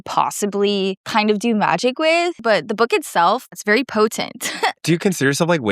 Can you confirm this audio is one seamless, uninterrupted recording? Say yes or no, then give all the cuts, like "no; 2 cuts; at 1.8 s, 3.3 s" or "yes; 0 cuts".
no; 4 cuts; at 1.0 s, 2.4 s, 3.6 s, 4.8 s